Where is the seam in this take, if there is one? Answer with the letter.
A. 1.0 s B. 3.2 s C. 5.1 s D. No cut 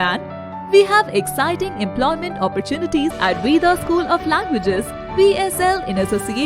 B